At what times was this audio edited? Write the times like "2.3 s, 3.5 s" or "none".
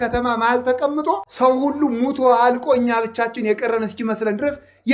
1.3 s